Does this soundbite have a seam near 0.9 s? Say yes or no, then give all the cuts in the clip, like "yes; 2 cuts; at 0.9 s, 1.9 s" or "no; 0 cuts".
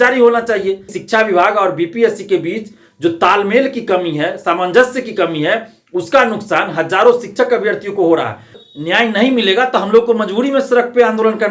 yes; 2 cuts; at 0.9 s, 8.7 s